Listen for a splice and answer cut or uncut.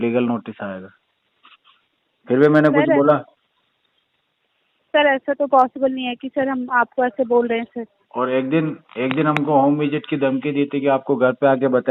uncut